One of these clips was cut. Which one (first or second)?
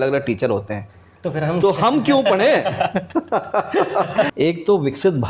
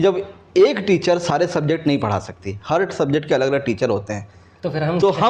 first